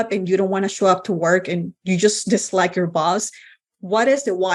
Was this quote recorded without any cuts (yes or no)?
yes